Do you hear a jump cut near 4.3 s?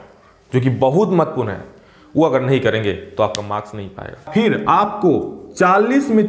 yes; 1 cut; at 4.3 s

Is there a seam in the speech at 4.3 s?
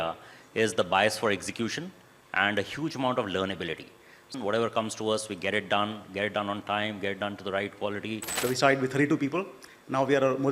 yes; 2 cuts; at 4.3 s, 8.4 s

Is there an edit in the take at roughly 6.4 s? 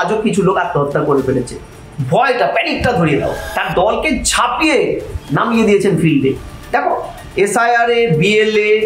no; 1 cut; at 3.4 s

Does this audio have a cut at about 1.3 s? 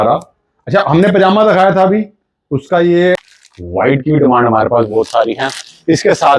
no; 1 cut; at 3.3 s

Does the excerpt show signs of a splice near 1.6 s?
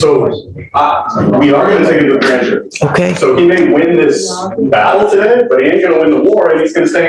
no; 0 cuts

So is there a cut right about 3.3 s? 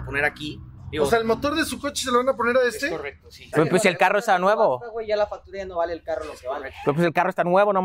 yes; 1 cut; at 3.3 s

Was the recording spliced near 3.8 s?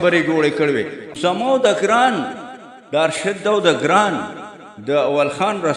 no; 1 cut; at 1.1 s

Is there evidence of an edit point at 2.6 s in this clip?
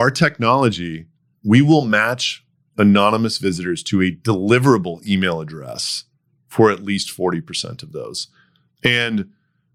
no; 0 cuts

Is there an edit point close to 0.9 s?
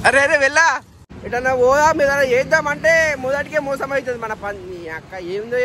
yes; 1 cut; at 0.9 s

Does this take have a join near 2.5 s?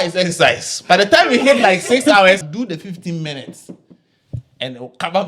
yes; 1 cut; at 2.5 s

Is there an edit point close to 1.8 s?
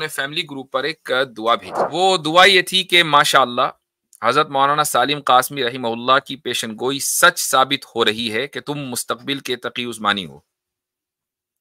yes; 1 cut; at 1.8 s

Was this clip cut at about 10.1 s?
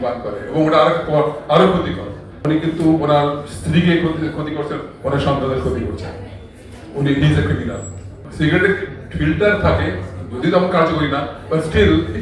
no; 2 cuts; at 2.4 s, 8.1 s

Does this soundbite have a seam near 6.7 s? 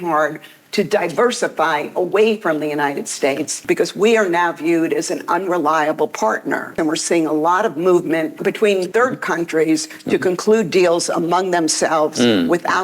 yes; 3 cuts; at 3.6 s, 6.7 s, 8.6 s

